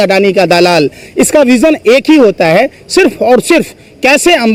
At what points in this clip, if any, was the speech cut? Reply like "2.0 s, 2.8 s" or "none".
none